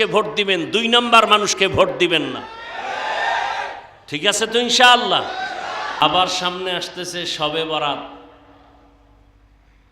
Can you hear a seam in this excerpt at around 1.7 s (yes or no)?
no